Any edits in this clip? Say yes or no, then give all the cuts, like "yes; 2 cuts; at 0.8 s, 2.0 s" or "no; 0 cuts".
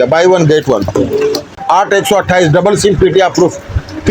yes; 1 cut; at 1.5 s